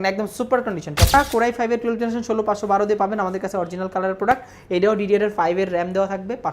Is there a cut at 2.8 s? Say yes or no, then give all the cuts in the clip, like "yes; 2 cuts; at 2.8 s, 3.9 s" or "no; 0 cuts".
no; 1 cut; at 1.1 s